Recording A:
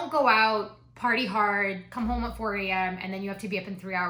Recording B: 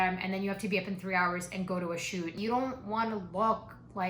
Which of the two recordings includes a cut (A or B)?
B